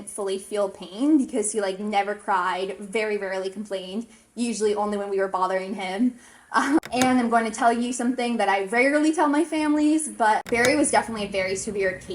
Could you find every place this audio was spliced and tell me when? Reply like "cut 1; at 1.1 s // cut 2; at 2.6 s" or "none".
cut 1; at 6.9 s // cut 2; at 10.5 s

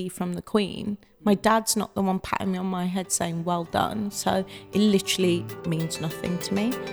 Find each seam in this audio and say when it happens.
none

